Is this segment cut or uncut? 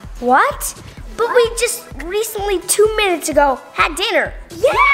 uncut